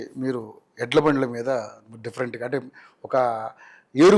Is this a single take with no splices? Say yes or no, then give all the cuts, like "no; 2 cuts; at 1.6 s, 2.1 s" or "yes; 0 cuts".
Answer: yes; 0 cuts